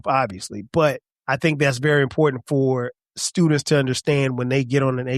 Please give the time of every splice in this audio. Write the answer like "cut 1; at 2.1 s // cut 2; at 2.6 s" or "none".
cut 1; at 1.1 s